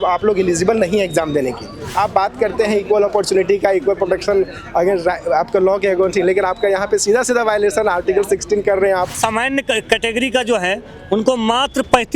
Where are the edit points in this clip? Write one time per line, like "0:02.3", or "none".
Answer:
0:01.9
0:09.2